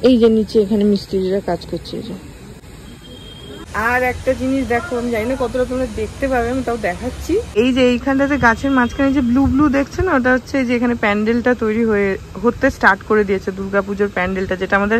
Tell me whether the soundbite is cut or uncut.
uncut